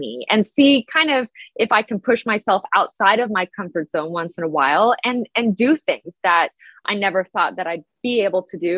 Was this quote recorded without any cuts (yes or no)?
no